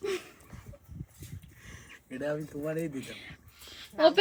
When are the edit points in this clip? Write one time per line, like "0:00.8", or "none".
none

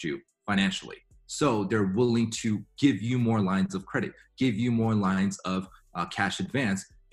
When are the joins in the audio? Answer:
none

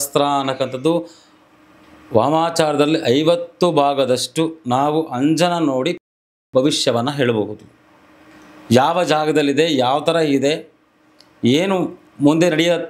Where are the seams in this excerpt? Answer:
none

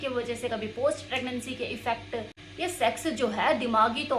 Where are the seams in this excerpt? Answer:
0:02.4

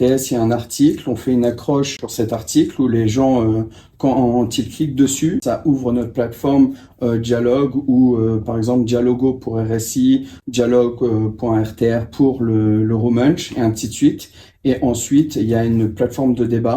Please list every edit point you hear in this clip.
0:02.0
0:05.4
0:10.4

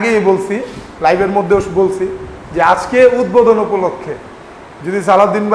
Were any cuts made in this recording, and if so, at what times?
none

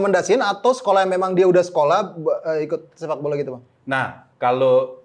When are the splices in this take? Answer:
none

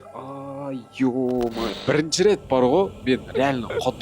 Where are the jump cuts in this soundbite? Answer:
0:01.8

